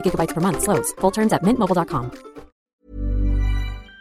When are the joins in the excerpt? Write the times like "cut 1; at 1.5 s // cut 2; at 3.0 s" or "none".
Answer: cut 1; at 2.5 s